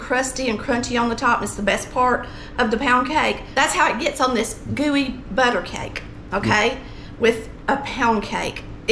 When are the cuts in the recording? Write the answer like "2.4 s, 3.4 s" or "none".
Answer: 3.4 s

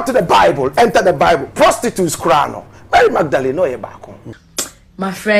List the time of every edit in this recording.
4.3 s

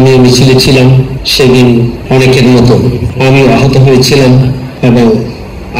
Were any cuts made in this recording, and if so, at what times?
1.2 s, 2.0 s, 3.0 s, 4.7 s

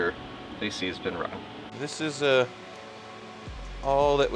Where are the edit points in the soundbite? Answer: 1.7 s

